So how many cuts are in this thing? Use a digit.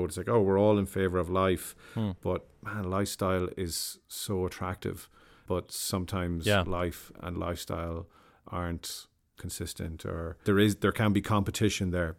0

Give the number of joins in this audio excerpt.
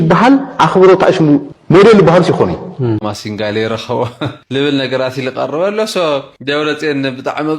1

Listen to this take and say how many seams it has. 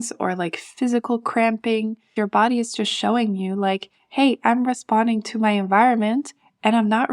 1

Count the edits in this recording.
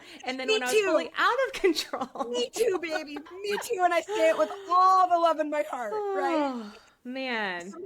1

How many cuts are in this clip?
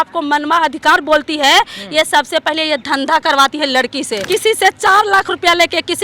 1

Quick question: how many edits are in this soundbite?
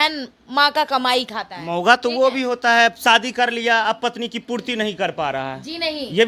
0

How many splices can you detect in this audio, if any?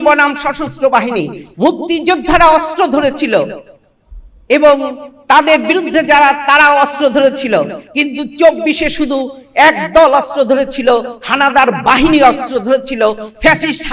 0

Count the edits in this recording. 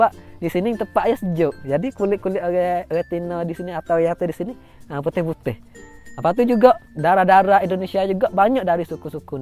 1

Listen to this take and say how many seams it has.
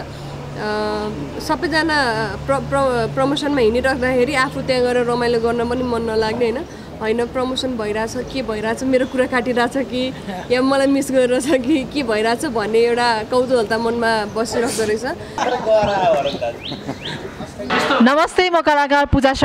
2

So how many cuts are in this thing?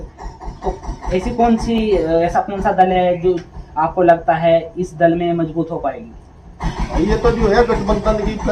0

